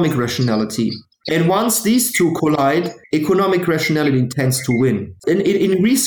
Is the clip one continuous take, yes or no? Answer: no